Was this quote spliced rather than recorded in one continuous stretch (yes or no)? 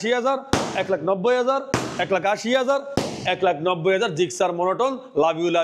no